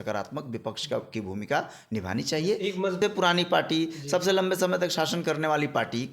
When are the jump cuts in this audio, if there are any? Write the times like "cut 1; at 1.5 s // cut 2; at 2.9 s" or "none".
cut 1; at 3.0 s